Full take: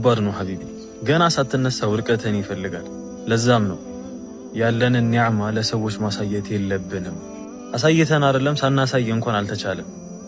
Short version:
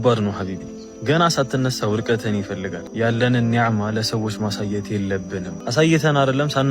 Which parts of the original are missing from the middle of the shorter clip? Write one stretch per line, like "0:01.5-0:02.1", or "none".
0:02.8-0:04.4
0:07.1-0:07.6